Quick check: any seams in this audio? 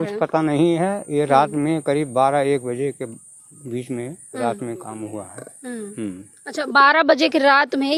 no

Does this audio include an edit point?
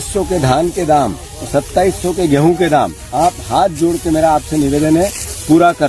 no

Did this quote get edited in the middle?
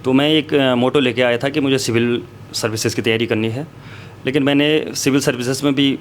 no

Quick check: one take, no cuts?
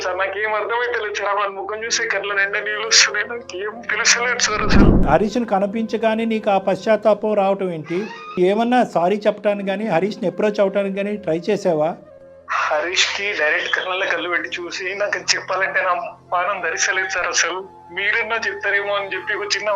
no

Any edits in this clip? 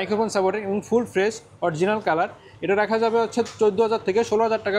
no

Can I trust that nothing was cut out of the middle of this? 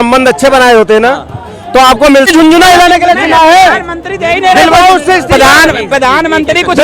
no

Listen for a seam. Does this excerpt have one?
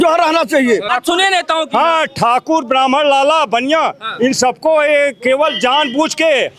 yes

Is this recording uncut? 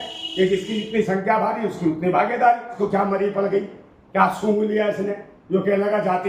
no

